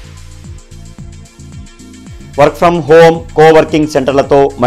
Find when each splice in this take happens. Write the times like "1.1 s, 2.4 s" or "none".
1.8 s